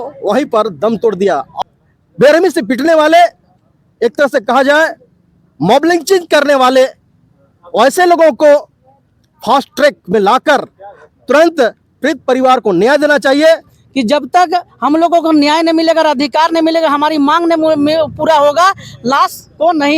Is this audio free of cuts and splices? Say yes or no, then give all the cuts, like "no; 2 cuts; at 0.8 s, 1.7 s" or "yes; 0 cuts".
no; 2 cuts; at 1.5 s, 13.8 s